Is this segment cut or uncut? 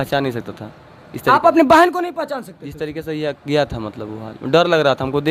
uncut